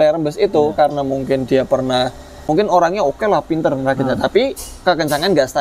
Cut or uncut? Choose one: cut